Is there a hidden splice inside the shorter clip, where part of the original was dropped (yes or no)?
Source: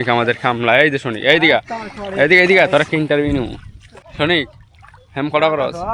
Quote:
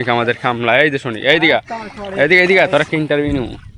no